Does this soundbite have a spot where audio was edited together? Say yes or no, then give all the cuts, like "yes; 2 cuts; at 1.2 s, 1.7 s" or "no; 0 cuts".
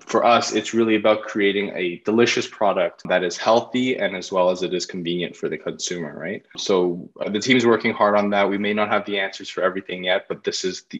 yes; 2 cuts; at 3.0 s, 6.6 s